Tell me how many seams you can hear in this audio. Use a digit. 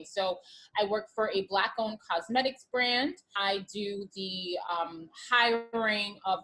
1